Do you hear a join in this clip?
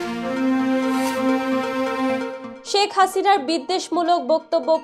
yes; 1 cut; at 2.5 s

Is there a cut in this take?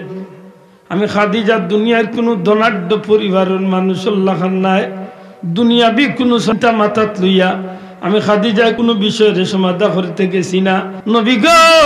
yes; 2 cuts; at 8.8 s, 10.9 s

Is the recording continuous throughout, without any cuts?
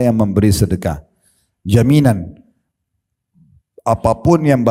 yes; 0 cuts

